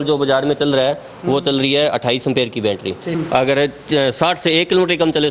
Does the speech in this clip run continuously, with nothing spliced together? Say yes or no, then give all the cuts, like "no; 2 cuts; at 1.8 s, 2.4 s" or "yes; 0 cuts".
no; 1 cut; at 3.2 s